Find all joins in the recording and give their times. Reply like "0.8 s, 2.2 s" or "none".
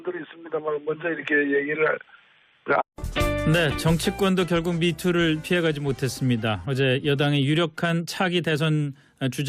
none